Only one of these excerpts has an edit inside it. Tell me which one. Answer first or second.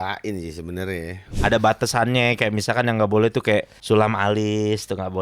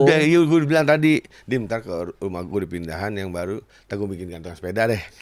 first